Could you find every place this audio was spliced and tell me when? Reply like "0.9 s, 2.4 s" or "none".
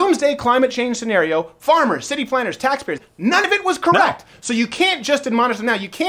3.4 s